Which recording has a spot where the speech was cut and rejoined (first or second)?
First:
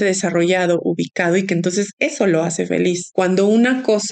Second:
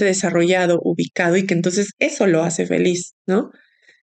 first